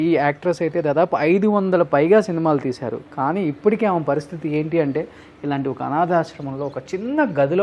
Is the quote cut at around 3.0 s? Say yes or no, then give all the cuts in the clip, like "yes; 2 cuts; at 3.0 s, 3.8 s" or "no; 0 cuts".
no; 0 cuts